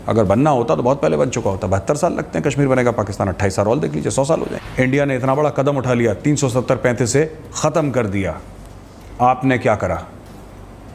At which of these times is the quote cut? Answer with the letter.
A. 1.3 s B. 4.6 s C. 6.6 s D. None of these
B